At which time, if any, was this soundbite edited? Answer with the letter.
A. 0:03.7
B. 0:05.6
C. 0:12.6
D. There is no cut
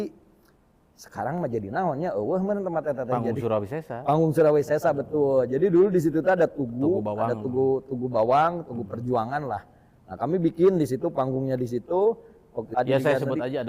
C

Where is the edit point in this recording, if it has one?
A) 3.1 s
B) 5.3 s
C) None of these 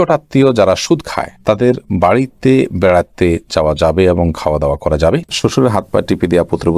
B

